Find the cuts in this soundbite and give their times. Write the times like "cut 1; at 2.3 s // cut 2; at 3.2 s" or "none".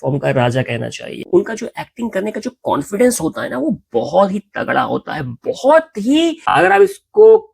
cut 1; at 1.2 s // cut 2; at 6.4 s